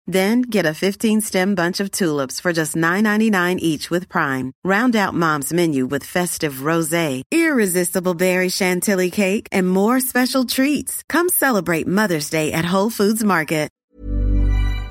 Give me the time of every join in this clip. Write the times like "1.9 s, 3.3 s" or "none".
13.8 s